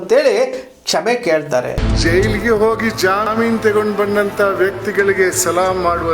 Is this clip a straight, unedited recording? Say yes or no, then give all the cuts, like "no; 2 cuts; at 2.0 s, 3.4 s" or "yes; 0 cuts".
no; 1 cut; at 1.8 s